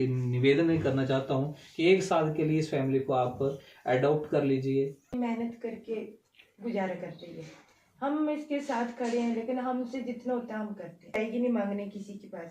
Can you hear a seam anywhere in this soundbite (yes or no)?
yes